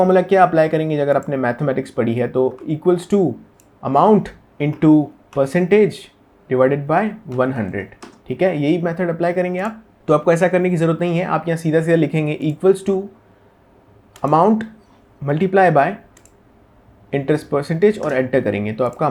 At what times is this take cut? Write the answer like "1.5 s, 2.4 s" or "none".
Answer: none